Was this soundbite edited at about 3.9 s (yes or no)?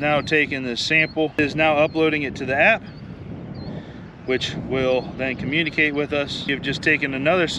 no